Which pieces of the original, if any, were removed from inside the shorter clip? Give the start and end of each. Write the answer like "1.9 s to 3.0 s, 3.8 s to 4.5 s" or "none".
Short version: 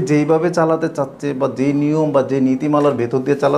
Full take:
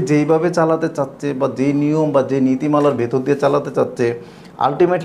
none

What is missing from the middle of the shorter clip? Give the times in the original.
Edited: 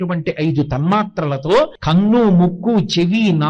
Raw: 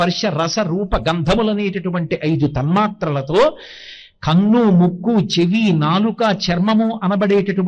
3.6 s to 4.2 s

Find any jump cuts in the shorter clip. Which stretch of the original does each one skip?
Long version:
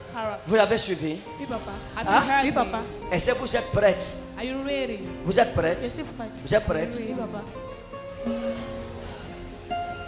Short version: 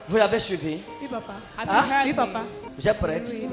2.9 s to 6.2 s

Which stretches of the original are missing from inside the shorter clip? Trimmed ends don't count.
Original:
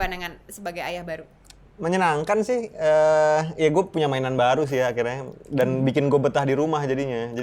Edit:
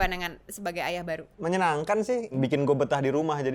1.3 s to 1.7 s, 2.7 s to 5.8 s

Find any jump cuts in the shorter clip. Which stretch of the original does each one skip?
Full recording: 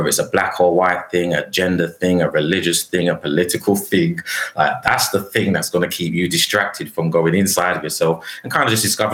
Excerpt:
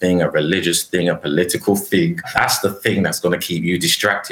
4.3 s to 4.8 s

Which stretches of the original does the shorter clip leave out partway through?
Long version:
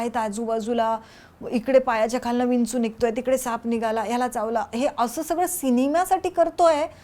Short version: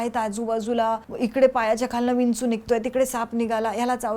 1.1 s to 1.4 s

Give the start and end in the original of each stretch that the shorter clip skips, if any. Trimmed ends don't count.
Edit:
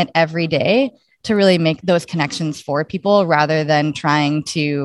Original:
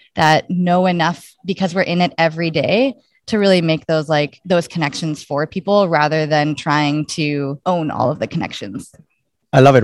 3.8 s to 4.4 s

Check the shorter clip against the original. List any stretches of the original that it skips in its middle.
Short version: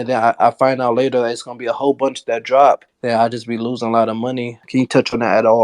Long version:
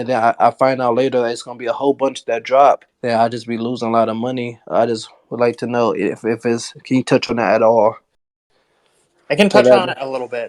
4.6 s to 6.7 s

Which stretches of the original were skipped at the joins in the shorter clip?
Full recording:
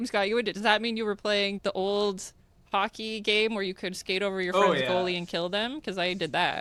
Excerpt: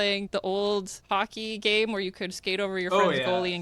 2.3 s to 2.6 s

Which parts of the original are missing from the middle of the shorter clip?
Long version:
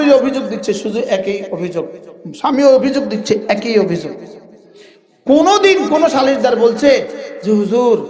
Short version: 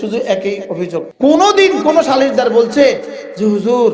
1.9 s to 5.2 s

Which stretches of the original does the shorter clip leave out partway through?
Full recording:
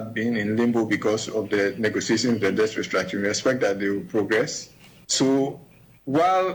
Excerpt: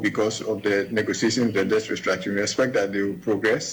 none

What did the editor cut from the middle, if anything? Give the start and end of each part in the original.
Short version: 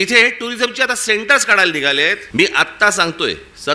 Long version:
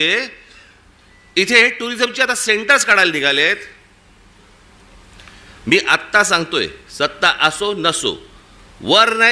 3.6 s to 5.6 s

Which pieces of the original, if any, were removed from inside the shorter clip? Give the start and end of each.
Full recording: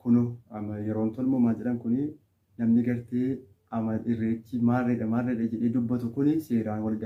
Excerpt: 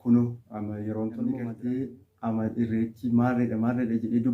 1.4 s to 2.9 s

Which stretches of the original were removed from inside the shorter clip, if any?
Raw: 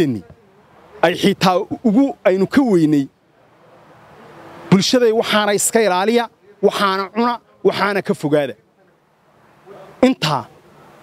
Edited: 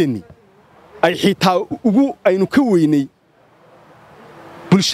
none

